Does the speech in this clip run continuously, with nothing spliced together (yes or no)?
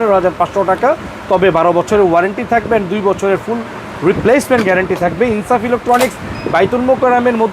yes